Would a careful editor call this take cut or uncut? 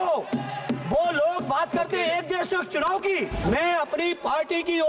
cut